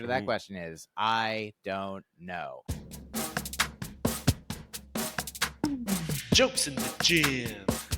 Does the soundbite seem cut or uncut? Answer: cut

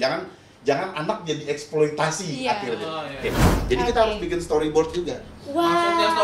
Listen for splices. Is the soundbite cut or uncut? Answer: cut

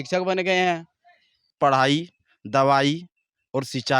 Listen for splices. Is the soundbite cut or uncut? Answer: cut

